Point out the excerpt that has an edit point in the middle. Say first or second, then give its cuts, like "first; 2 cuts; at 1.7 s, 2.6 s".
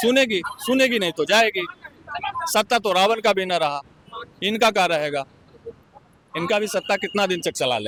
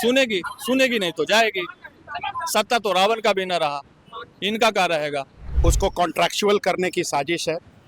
second; 1 cut; at 5.4 s